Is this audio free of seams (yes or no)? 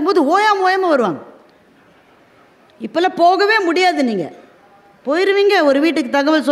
yes